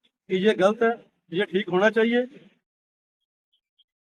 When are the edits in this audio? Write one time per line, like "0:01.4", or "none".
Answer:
none